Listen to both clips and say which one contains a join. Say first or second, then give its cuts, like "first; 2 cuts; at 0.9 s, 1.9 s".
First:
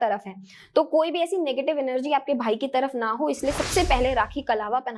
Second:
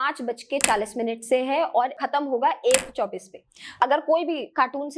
second; 2 cuts; at 2.0 s, 3.7 s